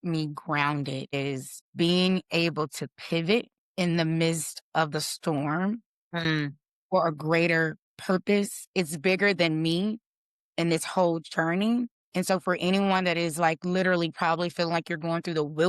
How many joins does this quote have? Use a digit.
3